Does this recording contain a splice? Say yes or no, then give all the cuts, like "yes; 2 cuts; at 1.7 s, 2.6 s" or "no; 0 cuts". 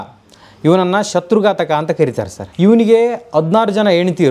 yes; 1 cut; at 2.4 s